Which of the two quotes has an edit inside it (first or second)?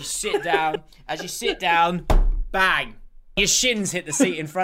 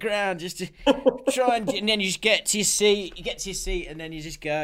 first